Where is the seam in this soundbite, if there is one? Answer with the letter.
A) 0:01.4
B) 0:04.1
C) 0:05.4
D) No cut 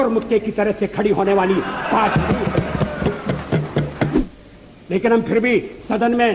B